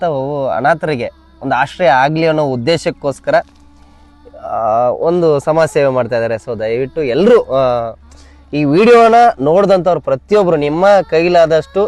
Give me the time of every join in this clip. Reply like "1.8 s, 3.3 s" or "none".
none